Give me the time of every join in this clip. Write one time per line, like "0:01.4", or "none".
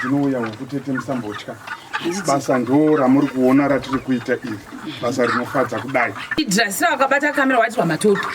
0:06.4

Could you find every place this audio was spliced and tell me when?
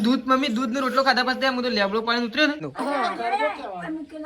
0:02.7

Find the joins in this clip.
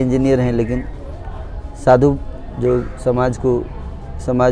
none

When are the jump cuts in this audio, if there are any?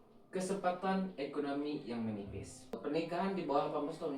0:02.8

